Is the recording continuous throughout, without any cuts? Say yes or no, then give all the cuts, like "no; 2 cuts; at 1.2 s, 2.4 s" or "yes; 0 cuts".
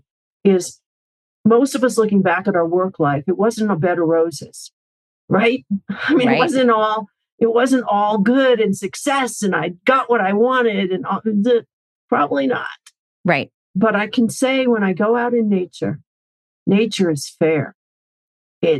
yes; 0 cuts